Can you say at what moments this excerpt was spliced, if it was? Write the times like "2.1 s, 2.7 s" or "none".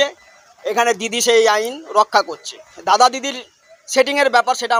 none